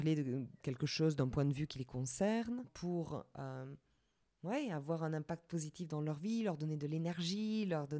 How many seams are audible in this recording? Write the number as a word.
one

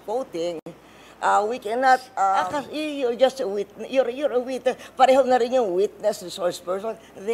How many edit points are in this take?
one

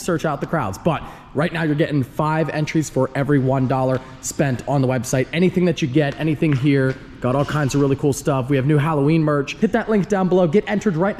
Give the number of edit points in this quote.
one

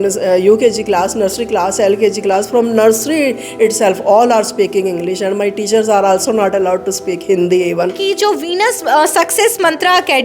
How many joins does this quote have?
one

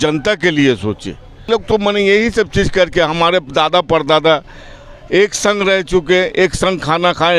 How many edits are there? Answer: one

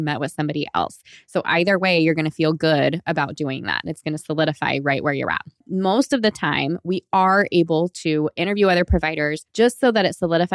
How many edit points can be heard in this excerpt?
two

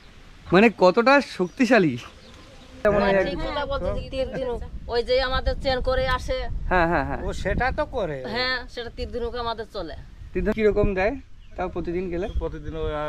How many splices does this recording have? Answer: two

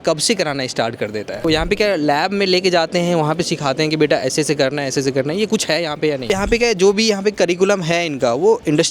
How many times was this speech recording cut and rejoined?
two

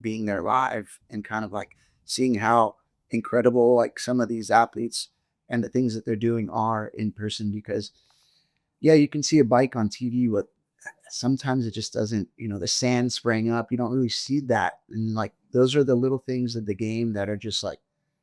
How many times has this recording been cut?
zero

